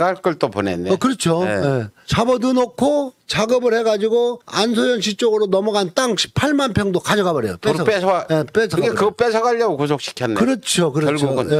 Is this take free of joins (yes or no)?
yes